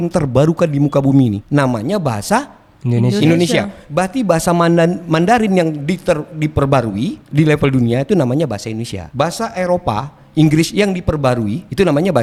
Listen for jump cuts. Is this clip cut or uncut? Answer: uncut